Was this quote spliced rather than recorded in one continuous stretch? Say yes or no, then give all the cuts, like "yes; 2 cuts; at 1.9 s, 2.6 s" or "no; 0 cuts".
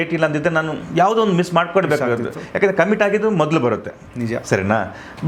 no; 0 cuts